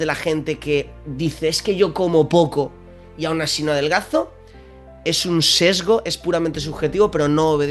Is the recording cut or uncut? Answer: uncut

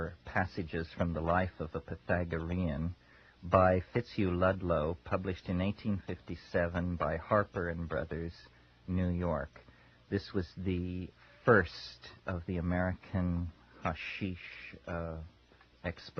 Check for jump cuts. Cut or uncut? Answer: cut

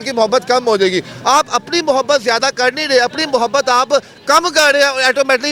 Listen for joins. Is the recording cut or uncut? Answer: uncut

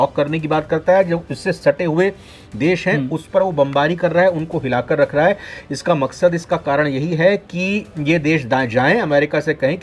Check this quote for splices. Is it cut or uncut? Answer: uncut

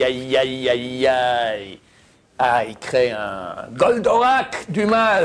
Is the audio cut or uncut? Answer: uncut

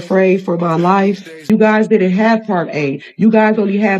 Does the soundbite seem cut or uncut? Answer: cut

